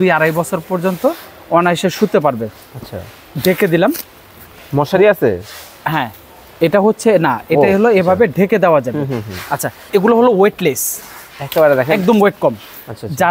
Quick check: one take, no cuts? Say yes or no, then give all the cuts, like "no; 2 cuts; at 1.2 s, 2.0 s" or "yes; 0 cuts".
no; 1 cut; at 9.8 s